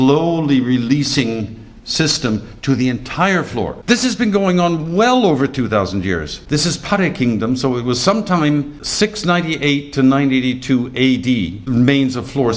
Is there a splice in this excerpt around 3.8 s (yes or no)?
yes